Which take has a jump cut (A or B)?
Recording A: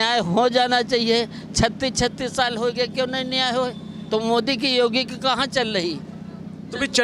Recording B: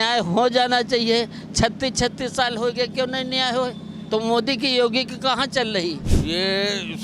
B